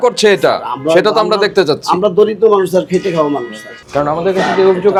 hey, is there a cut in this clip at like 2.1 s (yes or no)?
no